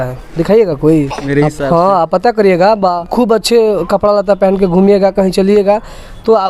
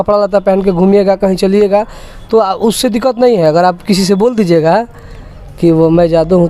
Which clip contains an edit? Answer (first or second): first